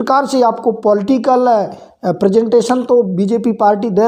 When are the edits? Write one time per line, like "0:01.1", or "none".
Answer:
none